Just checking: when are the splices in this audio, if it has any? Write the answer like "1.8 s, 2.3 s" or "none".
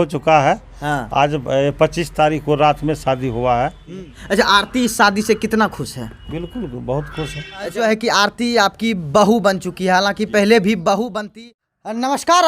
3.9 s, 7.7 s, 11.2 s